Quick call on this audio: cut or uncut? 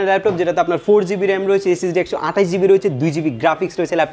uncut